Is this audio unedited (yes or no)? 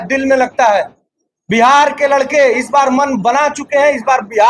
yes